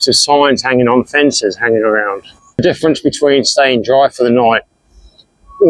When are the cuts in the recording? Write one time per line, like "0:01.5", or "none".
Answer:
0:02.6